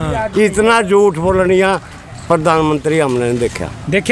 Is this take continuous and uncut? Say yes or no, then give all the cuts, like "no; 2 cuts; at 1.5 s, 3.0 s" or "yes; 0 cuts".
yes; 0 cuts